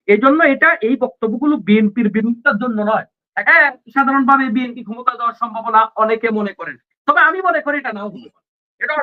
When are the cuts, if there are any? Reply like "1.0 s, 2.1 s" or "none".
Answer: 3.3 s